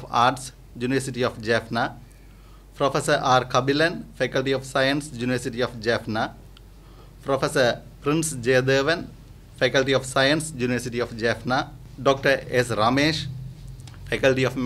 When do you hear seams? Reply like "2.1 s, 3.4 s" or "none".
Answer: 11.8 s